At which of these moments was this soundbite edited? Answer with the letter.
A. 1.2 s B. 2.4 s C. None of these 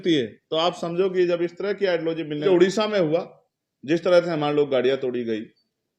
B